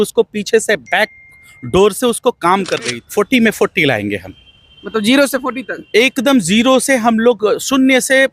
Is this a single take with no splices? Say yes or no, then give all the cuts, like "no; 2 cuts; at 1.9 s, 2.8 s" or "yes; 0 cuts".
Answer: no; 1 cut; at 3.0 s